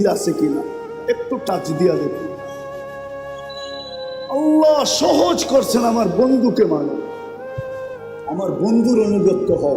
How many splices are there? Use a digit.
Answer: 2